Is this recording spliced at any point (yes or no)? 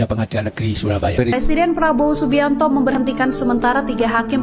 yes